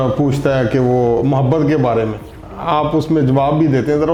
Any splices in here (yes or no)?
no